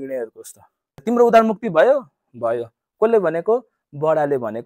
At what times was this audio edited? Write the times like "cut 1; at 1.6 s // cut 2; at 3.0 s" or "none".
cut 1; at 1.0 s